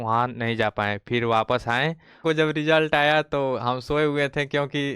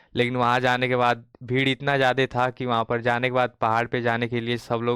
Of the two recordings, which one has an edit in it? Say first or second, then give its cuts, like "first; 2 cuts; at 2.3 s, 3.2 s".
first; 1 cut; at 2.1 s